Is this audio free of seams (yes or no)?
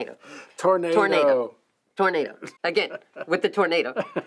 no